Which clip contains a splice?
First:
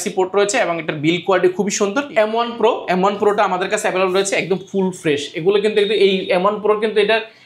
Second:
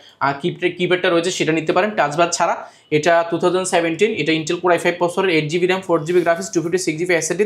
first; 1 cut; at 2.1 s

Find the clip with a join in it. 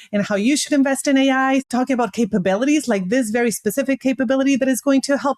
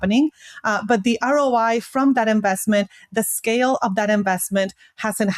first; 1 cut; at 1.7 s

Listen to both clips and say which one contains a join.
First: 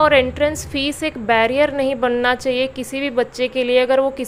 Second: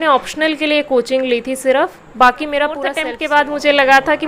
second; 1 cut; at 3.0 s

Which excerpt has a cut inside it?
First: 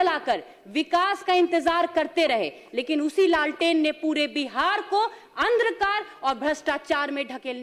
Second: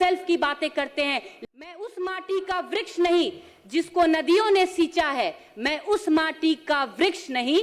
second; 1 cut; at 1.3 s

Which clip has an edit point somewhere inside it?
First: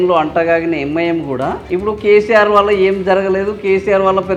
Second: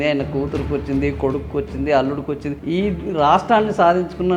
second; 1 cut; at 2.6 s

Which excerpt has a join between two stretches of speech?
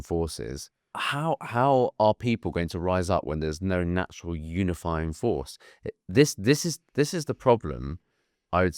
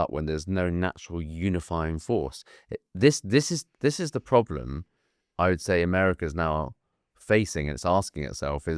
first; 1 cut; at 1.0 s

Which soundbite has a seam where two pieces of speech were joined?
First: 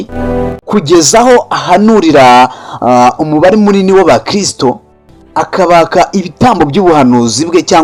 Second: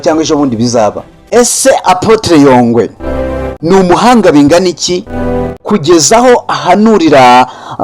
second; 1 cut; at 1.2 s

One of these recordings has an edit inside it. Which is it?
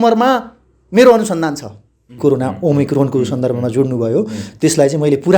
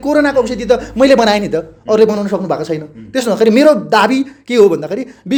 first; 1 cut; at 2.1 s

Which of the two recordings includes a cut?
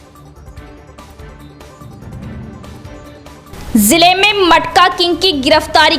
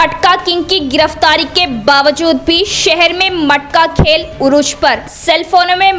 first; 1 cut; at 3.0 s

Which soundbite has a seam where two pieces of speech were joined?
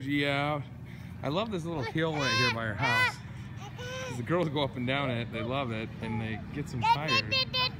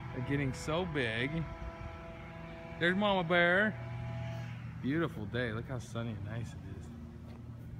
second; 1 cut; at 3.5 s

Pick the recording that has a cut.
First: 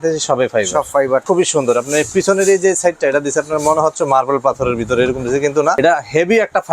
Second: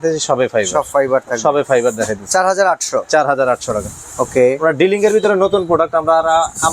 first; 2 cuts; at 1.2 s, 5.8 s

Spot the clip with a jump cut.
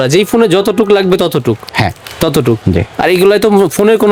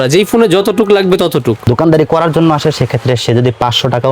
second; 1 cut; at 1.7 s

